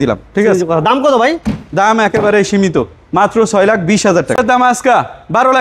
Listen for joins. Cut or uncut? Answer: cut